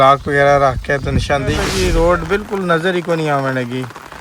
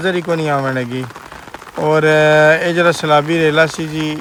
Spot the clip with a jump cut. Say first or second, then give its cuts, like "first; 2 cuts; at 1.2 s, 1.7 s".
first; 1 cut; at 1.7 s